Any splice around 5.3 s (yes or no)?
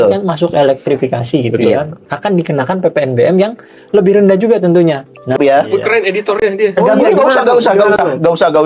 yes